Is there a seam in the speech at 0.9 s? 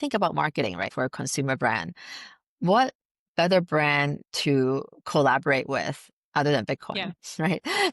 yes; 1 cut; at 0.9 s

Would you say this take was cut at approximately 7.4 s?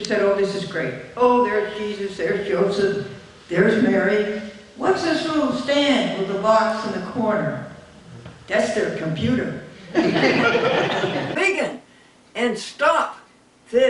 no; 1 cut; at 11.4 s

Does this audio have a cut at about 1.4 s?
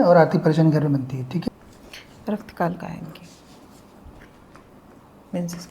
yes; 1 cut; at 1.4 s

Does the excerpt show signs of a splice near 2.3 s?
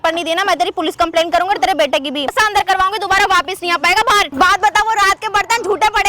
yes; 2 cuts; at 2.3 s, 4.3 s

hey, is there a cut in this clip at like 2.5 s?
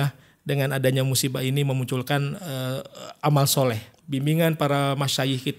no; 1 cut; at 3.9 s

